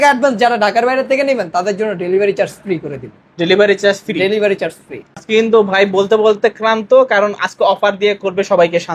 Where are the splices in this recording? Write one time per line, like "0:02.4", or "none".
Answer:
0:05.2